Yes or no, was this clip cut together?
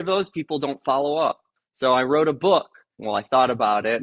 yes